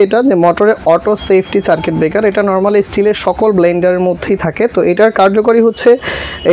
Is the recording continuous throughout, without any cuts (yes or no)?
yes